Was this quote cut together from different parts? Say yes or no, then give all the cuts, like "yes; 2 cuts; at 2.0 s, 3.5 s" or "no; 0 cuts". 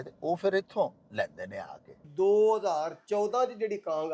yes; 1 cut; at 2.1 s